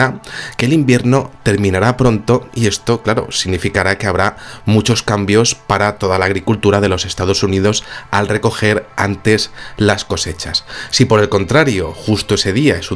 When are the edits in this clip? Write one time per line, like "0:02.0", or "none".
0:06.0